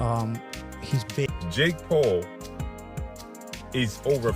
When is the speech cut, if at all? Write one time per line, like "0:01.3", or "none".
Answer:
0:01.3

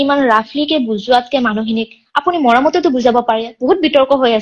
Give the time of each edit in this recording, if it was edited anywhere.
none

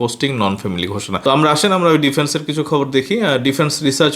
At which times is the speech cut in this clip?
0:01.2

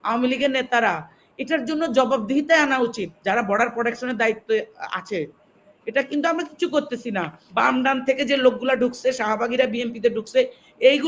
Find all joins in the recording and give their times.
0:07.4

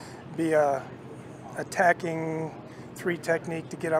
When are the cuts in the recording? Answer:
0:02.5

